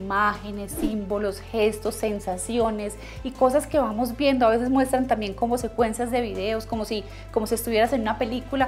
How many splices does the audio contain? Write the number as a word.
zero